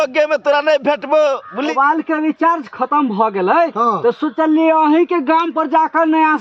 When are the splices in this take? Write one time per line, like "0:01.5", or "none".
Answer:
0:01.6